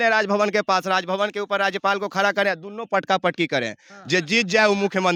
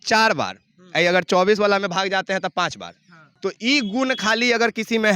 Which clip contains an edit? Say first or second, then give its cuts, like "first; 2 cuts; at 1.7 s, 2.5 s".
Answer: second; 1 cut; at 3.3 s